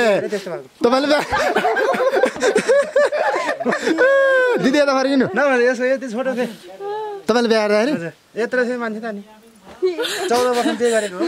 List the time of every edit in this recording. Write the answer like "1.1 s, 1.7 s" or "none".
none